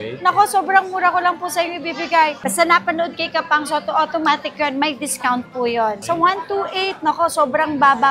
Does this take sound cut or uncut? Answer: cut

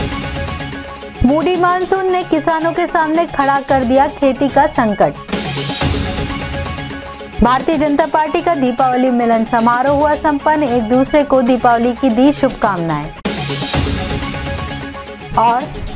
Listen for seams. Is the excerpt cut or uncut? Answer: cut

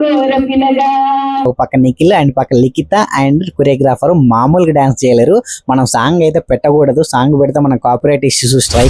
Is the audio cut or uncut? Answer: cut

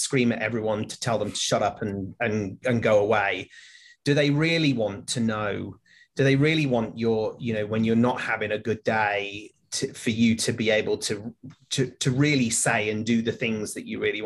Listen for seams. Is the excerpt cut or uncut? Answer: uncut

